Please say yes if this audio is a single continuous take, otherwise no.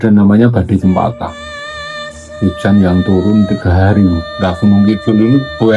no